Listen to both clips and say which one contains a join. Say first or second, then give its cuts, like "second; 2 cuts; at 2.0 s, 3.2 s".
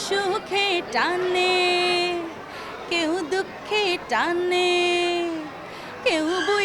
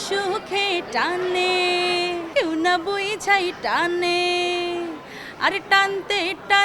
second; 1 cut; at 2.2 s